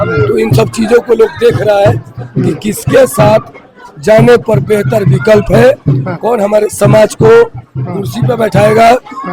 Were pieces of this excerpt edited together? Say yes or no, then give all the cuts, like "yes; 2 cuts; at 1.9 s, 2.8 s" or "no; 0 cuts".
no; 0 cuts